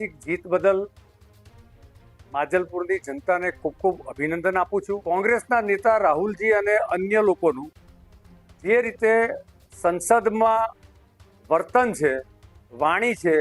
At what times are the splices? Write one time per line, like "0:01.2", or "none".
0:05.0

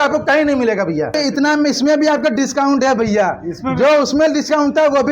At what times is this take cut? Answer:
0:01.2

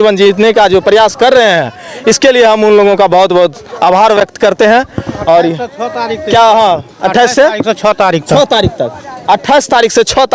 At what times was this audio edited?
none

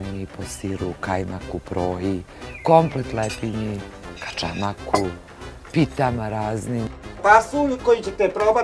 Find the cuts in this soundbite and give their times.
0:07.2

